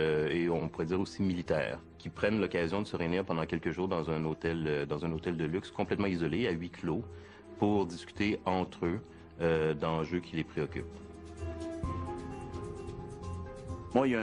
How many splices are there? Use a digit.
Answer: 0